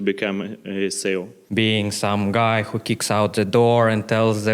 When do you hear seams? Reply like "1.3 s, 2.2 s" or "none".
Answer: 1.4 s